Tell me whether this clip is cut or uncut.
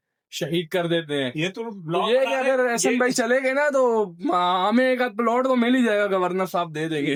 uncut